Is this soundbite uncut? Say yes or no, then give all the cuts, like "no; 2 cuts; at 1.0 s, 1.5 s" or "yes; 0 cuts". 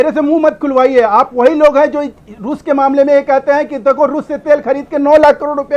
yes; 0 cuts